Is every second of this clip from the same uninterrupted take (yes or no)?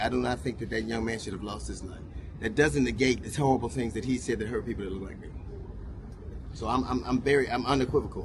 yes